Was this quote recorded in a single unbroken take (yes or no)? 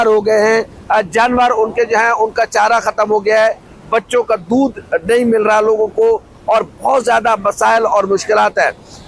yes